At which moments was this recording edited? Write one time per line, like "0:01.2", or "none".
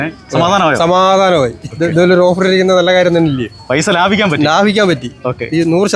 none